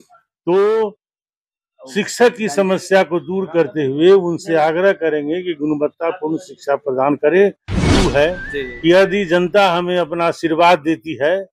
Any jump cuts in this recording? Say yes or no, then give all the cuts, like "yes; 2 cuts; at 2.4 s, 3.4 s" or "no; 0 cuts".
yes; 1 cut; at 7.8 s